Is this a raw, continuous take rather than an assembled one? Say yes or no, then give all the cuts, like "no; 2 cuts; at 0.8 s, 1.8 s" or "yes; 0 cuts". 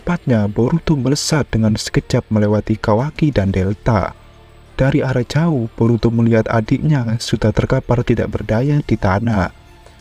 yes; 0 cuts